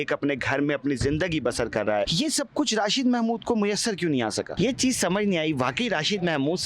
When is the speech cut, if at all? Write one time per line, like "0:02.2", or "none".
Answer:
0:02.1
0:04.5